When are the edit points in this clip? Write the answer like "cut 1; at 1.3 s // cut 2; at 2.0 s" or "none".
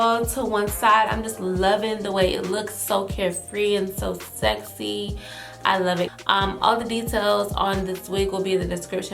cut 1; at 6.1 s